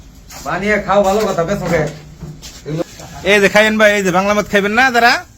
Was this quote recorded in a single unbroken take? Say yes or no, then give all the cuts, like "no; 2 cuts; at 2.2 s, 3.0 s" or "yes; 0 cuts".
no; 1 cut; at 2.8 s